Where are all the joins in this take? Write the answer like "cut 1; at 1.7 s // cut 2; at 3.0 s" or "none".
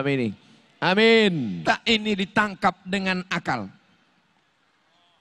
cut 1; at 1.6 s

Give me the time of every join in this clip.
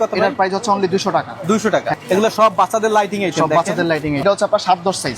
cut 1; at 2.0 s // cut 2; at 4.2 s

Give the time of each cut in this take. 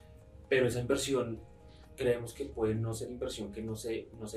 none

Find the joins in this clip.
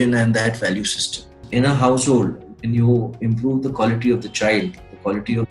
cut 1; at 1.4 s

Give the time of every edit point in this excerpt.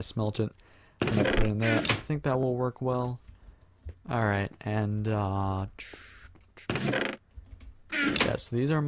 cut 1; at 5.5 s

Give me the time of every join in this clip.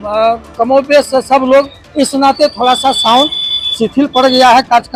none

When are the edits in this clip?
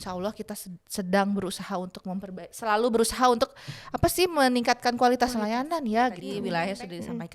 cut 1; at 6.3 s

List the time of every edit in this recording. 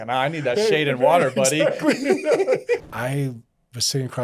cut 1; at 2.8 s

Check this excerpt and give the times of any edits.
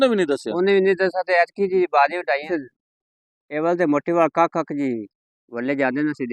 cut 1; at 2.4 s

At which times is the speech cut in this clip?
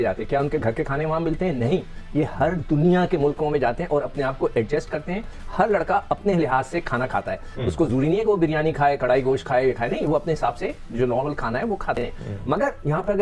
none

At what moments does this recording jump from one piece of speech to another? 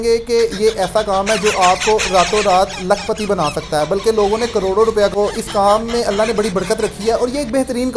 cut 1; at 5.1 s

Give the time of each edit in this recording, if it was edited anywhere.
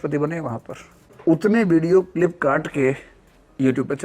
cut 1; at 1.1 s

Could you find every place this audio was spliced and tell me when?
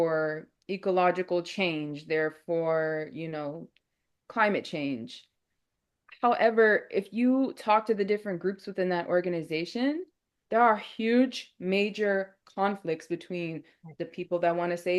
none

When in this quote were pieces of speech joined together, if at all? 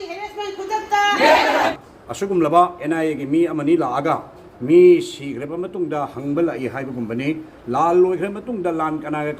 cut 1; at 1.7 s

